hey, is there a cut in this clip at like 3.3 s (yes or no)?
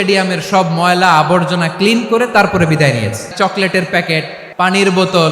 yes